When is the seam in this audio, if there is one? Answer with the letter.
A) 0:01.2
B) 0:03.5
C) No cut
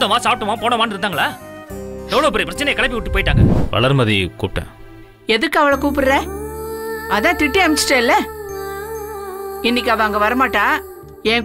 B